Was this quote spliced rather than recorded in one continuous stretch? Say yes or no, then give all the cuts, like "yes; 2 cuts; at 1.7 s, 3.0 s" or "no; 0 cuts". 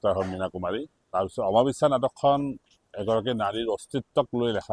yes; 1 cut; at 1.0 s